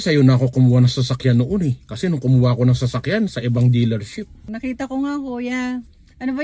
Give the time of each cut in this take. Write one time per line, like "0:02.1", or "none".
0:04.4